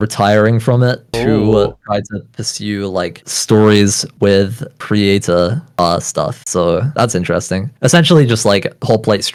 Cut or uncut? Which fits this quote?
uncut